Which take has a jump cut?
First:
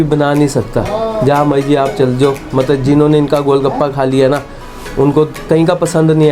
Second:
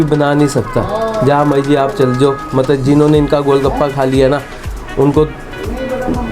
first; 1 cut; at 5.4 s

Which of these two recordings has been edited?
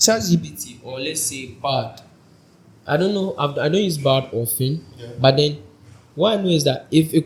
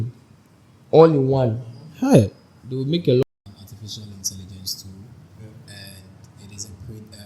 second; 1 cut; at 3.2 s

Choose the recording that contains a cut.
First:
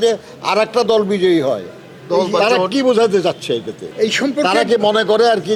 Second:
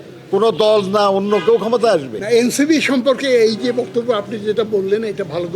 second; 1 cut; at 2.1 s

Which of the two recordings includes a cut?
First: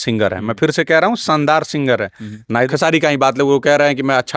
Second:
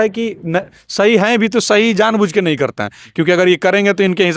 first; 1 cut; at 2.4 s

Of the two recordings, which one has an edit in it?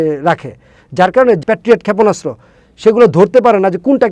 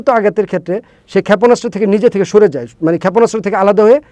first; 1 cut; at 1.4 s

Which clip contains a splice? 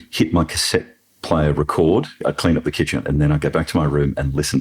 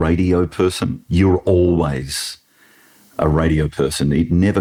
first; 1 cut; at 2.2 s

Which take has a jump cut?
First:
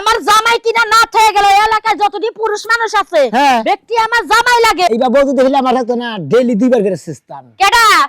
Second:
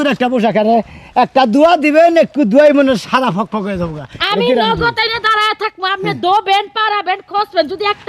first; 1 cut; at 4.9 s

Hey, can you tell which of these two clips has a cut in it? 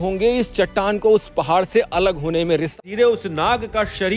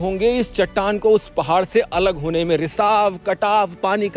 first; 1 cut; at 2.8 s

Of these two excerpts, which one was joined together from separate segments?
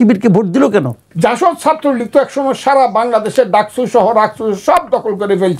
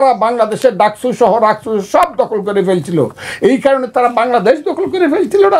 first; 1 cut; at 1.0 s

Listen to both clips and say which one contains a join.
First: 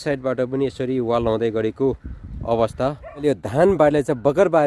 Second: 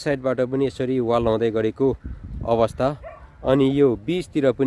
first; 1 cut; at 3.2 s

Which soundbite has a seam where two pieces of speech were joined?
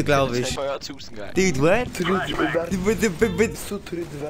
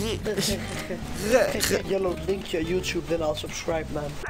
second; 1 cut; at 2.0 s

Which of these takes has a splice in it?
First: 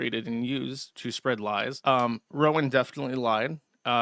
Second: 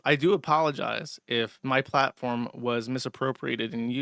first; 1 cut; at 1.8 s

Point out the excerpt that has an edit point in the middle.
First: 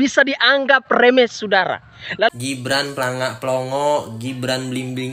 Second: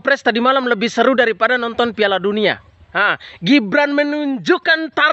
first; 1 cut; at 2.3 s

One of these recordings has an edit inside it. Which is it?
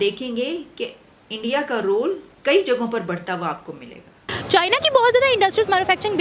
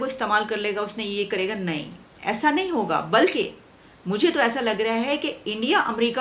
first; 1 cut; at 4.3 s

